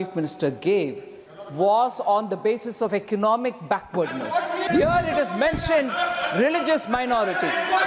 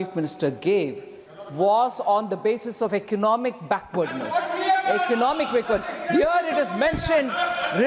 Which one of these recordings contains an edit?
first; 1 cut; at 4.6 s

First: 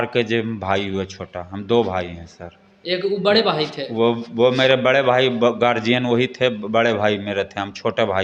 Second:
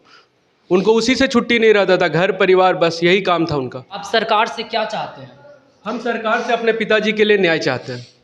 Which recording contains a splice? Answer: second; 1 cut; at 4.0 s

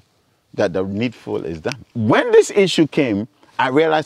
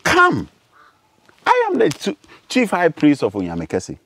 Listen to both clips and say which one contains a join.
first; 1 cut; at 1.9 s

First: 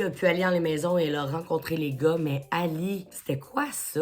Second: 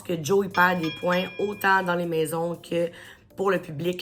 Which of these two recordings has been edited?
first; 1 cut; at 3.1 s

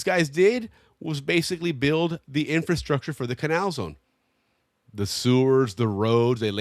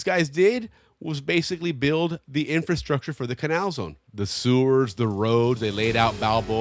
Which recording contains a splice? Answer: second; 1 cut; at 4.0 s

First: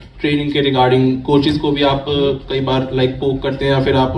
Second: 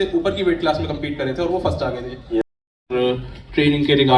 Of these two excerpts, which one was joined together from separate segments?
second; 1 cut; at 2.4 s

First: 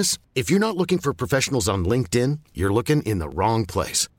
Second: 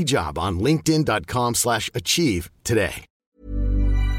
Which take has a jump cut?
second; 1 cut; at 3.2 s

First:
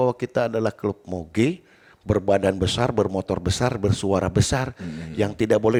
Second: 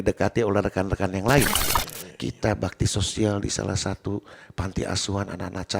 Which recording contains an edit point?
second; 1 cut; at 1.6 s

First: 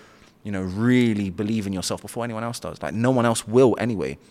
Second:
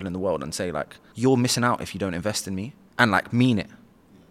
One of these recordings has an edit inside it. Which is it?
second; 2 cuts; at 1.0 s, 2.7 s

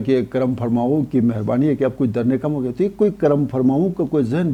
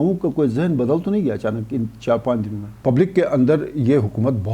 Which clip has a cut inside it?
second; 1 cut; at 2.7 s

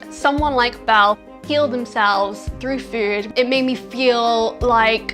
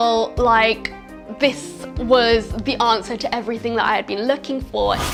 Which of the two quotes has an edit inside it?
first; 1 cut; at 3.3 s

